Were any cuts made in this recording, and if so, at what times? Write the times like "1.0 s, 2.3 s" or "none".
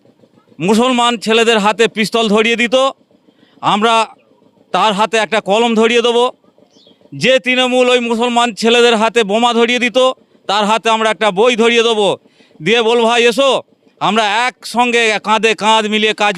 none